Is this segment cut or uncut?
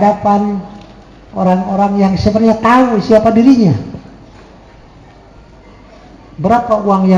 uncut